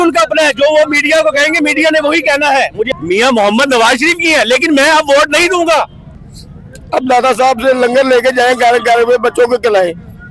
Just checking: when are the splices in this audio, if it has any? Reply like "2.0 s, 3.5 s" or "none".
2.9 s, 6.0 s